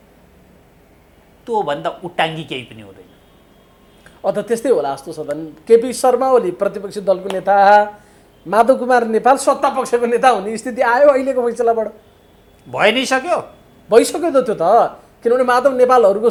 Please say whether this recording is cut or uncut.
uncut